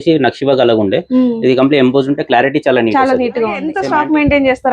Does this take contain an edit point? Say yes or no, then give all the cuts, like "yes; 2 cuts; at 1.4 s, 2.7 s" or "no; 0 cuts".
yes; 1 cut; at 3.7 s